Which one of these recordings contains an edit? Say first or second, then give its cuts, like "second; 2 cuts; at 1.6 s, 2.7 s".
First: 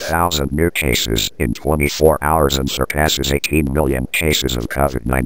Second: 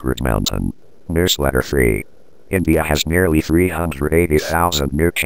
second; 1 cut; at 1.1 s